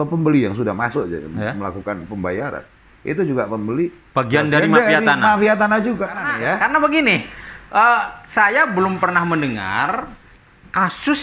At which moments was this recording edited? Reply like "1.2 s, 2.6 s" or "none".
6.3 s